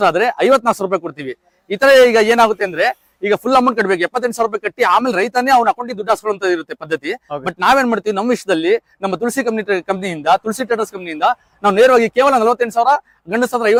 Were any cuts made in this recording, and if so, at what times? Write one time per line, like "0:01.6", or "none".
none